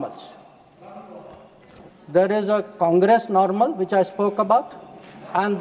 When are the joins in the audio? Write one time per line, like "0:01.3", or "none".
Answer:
none